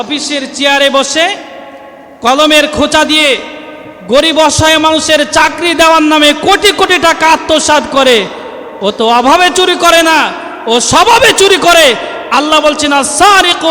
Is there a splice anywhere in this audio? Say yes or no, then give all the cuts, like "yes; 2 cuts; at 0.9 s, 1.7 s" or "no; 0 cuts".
no; 0 cuts